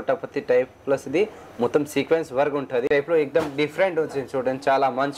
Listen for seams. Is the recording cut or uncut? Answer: cut